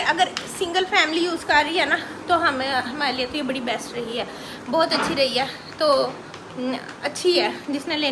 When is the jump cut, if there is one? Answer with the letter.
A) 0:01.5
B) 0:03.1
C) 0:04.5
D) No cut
D